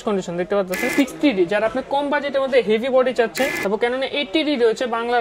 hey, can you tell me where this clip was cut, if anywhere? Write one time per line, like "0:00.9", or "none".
0:00.9
0:03.5

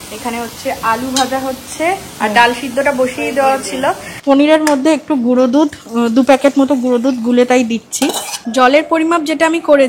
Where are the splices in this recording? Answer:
0:04.1
0:08.4

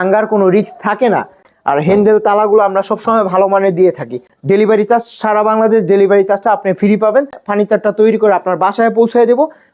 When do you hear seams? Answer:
0:01.5
0:04.3
0:07.4

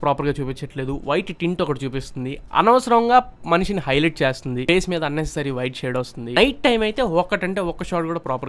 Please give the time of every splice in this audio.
0:06.4

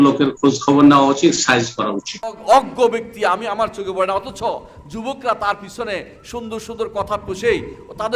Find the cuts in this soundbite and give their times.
0:02.4

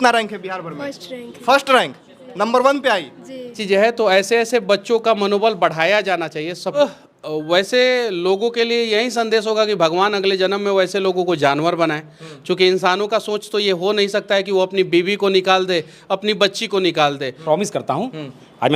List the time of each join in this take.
0:03.6
0:06.8
0:17.4

